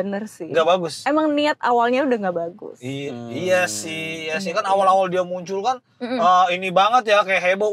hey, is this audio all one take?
yes; 0 cuts

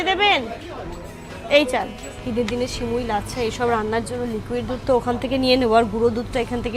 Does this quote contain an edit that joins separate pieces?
yes; 1 cut; at 2.0 s

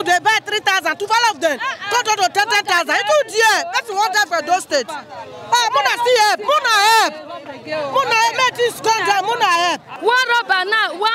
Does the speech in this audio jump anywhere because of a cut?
yes; 1 cut; at 9.9 s

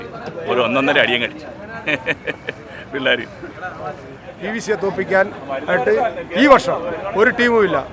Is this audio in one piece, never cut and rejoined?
no; 1 cut; at 4.3 s

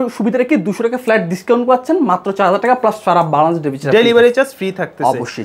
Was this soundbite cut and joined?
no; 0 cuts

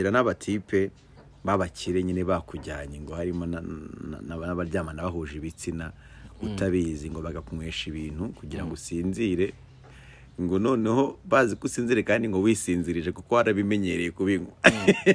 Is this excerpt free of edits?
yes; 0 cuts

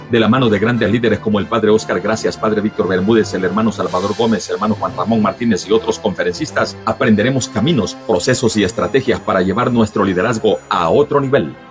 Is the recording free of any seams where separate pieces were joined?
no; 2 cuts; at 4.7 s, 8.2 s

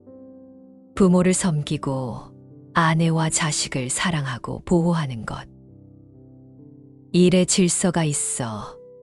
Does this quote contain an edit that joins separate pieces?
yes; 2 cuts; at 5.5 s, 7.1 s

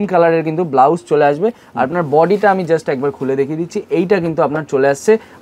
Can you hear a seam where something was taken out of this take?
no; 0 cuts

